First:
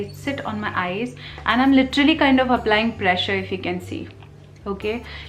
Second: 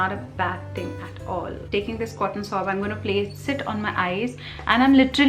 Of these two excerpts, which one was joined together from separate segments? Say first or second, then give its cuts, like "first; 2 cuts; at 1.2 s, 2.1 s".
second; 1 cut; at 1.6 s